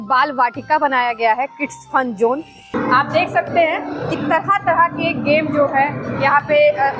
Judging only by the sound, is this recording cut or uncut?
cut